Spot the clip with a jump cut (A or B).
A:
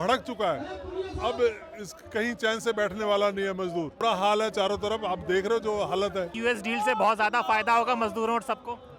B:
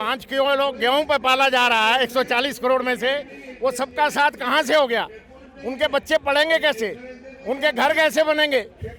A